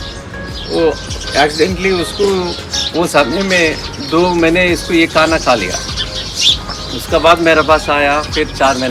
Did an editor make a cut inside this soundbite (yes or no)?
no